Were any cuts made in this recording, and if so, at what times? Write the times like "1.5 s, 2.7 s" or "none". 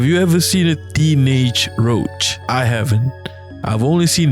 2.3 s